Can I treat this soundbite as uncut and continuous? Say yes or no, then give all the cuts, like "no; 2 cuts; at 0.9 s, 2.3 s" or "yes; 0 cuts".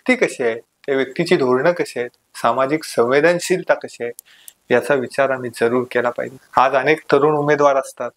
no; 1 cut; at 6.3 s